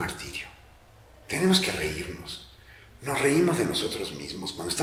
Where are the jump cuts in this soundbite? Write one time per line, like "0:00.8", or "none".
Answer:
none